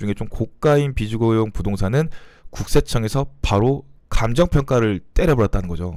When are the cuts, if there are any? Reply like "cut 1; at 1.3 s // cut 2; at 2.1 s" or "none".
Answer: none